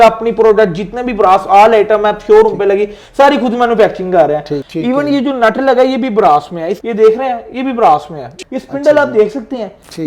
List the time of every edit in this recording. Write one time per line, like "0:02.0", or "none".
0:04.6
0:06.7
0:08.3